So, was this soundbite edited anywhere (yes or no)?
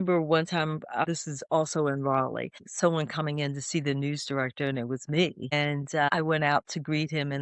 yes